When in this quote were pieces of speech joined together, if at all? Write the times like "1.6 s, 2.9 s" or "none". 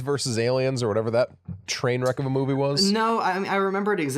none